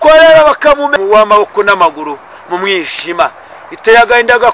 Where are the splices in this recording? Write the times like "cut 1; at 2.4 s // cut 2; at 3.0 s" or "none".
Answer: cut 1; at 0.9 s